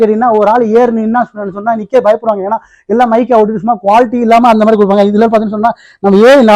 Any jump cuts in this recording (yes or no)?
no